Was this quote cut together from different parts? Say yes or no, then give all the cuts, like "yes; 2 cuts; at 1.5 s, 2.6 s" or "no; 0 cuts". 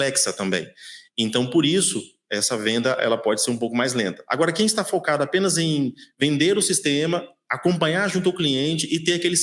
no; 0 cuts